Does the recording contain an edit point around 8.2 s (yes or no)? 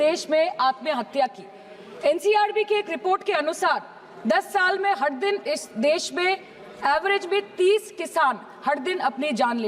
no